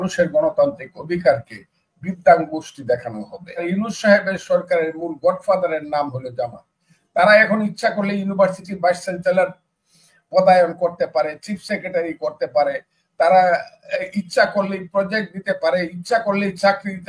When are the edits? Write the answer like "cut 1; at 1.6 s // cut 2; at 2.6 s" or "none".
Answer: cut 1; at 3.6 s